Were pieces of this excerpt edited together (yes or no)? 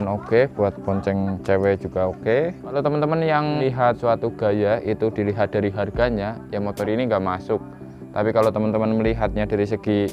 yes